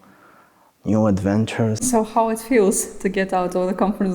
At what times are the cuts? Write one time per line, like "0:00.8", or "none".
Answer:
0:01.9